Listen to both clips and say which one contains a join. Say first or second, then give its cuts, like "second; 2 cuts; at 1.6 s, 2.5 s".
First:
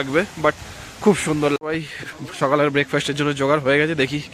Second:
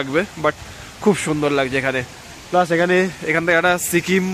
first; 1 cut; at 1.6 s